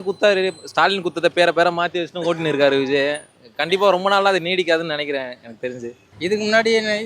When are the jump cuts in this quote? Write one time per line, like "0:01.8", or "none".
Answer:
0:06.0